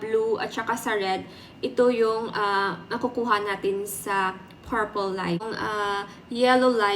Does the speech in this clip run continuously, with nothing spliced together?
no; 1 cut; at 5.5 s

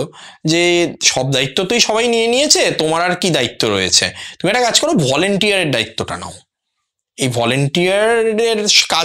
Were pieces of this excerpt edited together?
no; 0 cuts

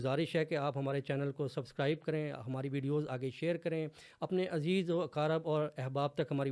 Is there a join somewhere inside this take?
no; 0 cuts

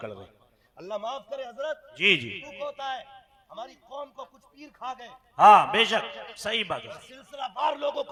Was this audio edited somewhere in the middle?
no; 0 cuts

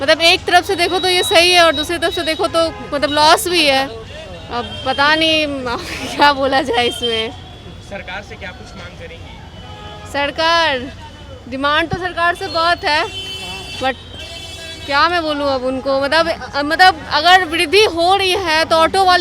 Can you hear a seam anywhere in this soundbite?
no; 0 cuts

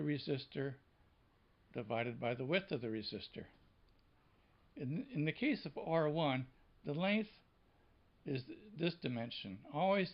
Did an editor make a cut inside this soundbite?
yes; 1 cut; at 3.4 s

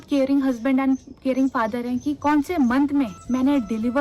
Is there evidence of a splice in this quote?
yes; 2 cuts; at 2.2 s, 3.2 s

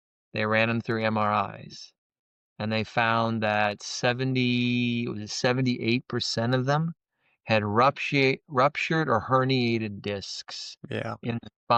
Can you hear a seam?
no; 0 cuts

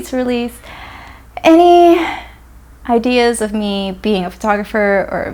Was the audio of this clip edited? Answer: no; 0 cuts

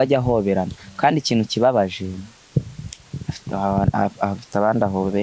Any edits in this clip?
no; 0 cuts

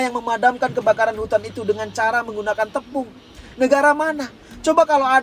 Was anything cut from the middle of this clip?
no; 0 cuts

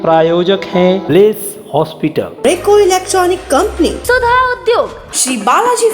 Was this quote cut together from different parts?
no; 0 cuts

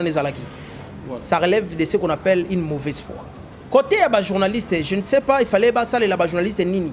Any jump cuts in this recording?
yes; 1 cut; at 3.8 s

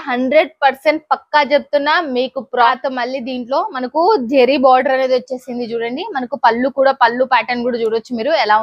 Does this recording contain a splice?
yes; 1 cut; at 2.7 s

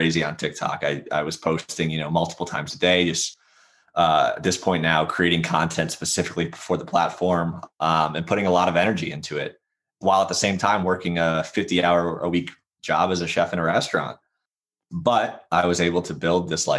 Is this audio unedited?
yes; 0 cuts

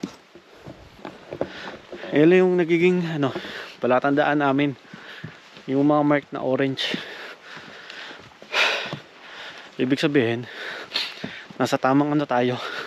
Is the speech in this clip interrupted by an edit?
yes; 1 cut; at 1.0 s

